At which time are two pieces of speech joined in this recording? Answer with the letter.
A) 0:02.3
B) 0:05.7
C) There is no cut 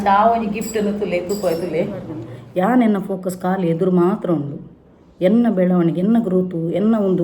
A